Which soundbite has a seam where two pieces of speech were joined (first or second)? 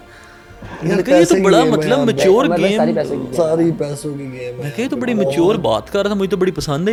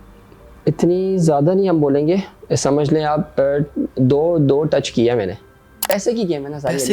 second